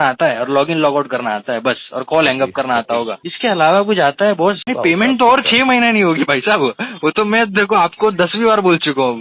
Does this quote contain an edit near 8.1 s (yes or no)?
no